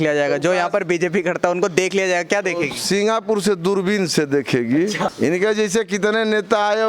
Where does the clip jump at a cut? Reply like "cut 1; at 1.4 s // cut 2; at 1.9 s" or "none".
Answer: cut 1; at 5.1 s